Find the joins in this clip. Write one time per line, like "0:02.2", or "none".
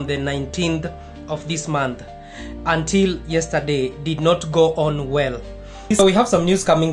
0:05.8